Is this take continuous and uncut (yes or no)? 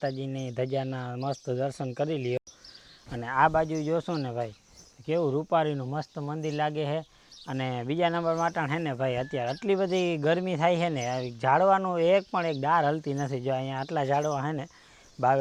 yes